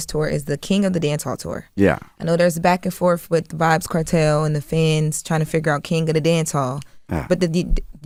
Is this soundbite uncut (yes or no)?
yes